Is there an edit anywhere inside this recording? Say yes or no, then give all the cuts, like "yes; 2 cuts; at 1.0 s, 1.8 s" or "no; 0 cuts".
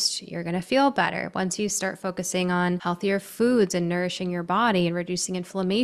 yes; 1 cut; at 2.8 s